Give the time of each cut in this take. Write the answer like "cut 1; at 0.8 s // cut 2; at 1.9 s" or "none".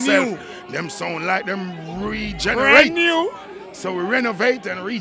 none

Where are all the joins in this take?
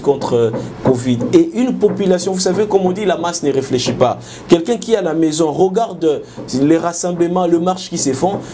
none

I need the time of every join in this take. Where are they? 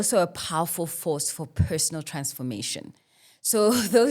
none

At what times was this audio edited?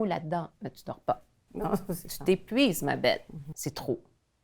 cut 1; at 3.5 s

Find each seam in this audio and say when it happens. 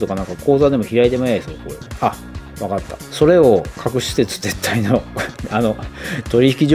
none

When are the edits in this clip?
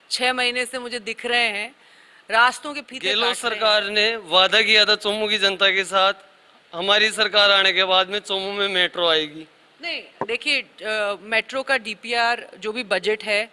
cut 1; at 2.9 s

